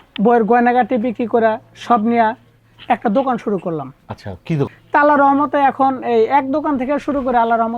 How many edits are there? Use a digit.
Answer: 1